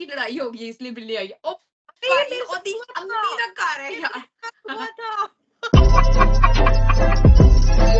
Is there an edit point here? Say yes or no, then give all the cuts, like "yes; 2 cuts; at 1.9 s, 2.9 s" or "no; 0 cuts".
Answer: no; 0 cuts